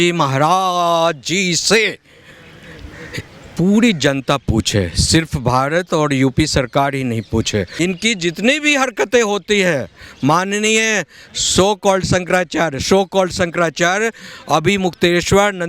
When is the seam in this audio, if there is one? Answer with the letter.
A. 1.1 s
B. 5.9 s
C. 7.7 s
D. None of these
C